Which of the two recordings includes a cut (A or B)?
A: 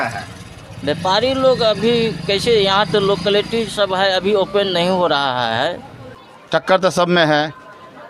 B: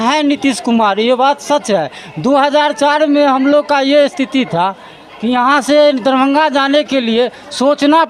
A